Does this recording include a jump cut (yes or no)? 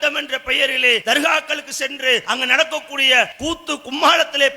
yes